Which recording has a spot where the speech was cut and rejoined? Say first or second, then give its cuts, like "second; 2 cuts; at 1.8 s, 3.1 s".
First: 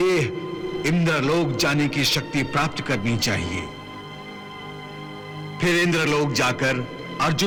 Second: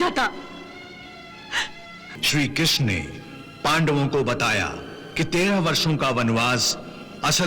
second; 1 cut; at 2.1 s